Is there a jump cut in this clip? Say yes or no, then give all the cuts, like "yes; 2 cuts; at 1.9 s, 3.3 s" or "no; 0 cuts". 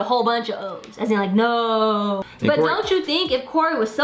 yes; 1 cut; at 2.2 s